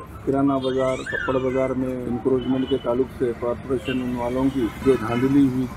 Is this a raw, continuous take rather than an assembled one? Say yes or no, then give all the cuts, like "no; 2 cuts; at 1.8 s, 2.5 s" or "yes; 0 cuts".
no; 2 cuts; at 2.0 s, 4.8 s